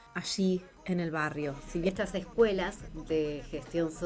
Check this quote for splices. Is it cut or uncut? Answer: cut